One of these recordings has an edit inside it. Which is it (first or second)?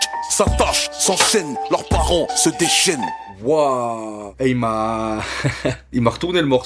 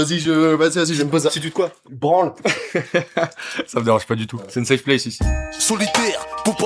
second